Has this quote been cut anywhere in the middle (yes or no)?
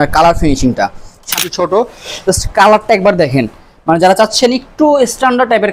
yes